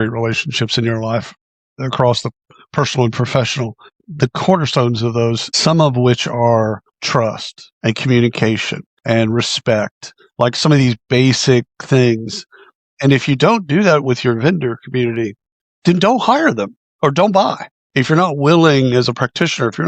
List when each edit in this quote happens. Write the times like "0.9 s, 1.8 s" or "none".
none